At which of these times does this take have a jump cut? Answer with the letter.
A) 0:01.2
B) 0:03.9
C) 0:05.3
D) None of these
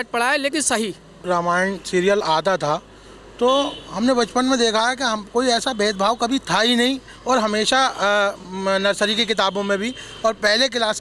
A